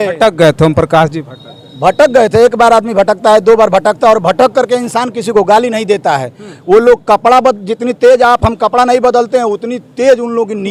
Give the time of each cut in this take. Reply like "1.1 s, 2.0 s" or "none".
none